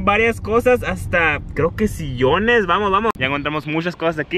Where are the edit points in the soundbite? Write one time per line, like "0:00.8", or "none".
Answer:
0:03.1